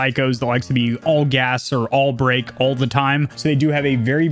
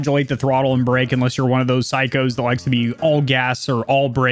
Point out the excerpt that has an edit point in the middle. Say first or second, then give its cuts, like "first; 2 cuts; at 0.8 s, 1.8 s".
first; 1 cut; at 3.3 s